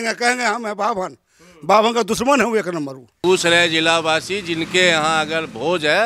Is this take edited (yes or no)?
yes